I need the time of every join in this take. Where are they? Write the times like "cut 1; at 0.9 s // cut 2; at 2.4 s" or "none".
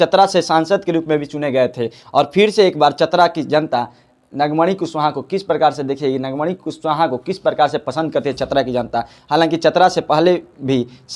none